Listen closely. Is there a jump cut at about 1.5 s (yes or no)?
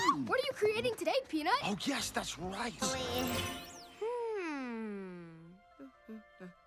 no